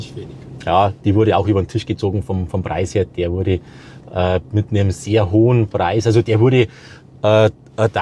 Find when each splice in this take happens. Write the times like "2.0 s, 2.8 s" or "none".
none